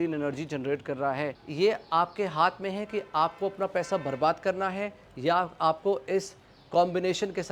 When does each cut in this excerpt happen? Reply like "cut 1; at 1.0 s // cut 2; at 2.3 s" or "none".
cut 1; at 1.4 s